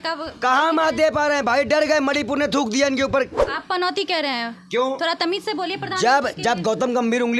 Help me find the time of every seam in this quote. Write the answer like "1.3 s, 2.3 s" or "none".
3.4 s